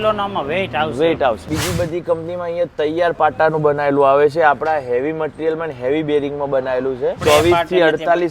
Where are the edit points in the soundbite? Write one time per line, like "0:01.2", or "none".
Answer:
0:01.4
0:07.2